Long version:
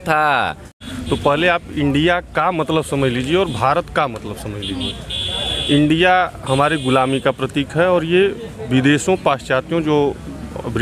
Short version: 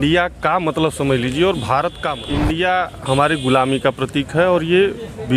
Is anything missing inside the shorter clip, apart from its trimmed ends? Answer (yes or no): yes